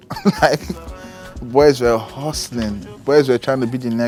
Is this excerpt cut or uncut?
uncut